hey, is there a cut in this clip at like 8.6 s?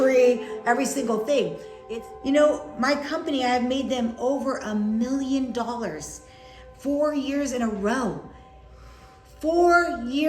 no; 1 cut; at 1.7 s

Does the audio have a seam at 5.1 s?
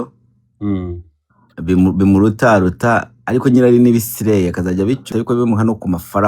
yes; 1 cut; at 5.1 s

